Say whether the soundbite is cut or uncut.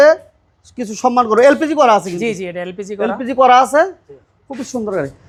uncut